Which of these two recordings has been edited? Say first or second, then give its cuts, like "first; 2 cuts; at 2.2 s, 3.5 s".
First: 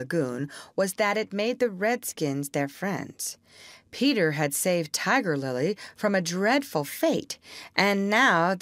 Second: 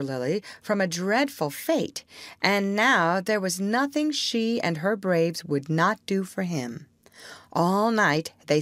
first; 1 cut; at 1.3 s